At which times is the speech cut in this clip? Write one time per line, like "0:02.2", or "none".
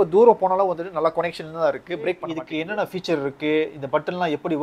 0:02.4